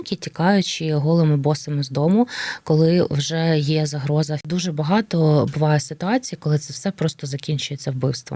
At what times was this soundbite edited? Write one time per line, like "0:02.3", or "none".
0:04.4

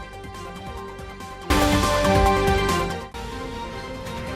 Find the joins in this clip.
0:01.5

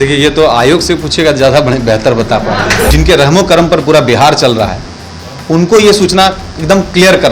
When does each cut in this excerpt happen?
0:02.9

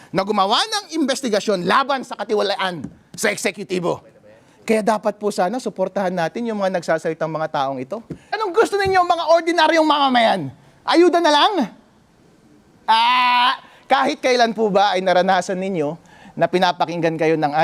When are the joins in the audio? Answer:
0:08.4

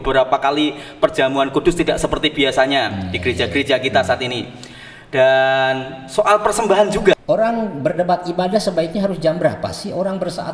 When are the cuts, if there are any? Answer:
0:07.1

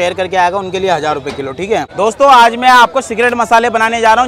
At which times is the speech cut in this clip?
0:01.9

